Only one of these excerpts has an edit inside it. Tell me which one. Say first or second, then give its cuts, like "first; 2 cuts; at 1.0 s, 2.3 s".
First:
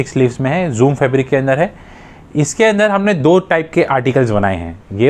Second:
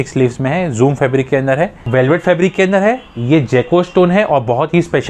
second; 1 cut; at 1.8 s